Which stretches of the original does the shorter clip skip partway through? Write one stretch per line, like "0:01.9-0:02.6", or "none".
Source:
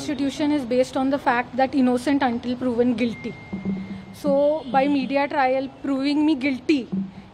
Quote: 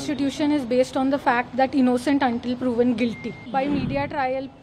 0:03.4-0:04.6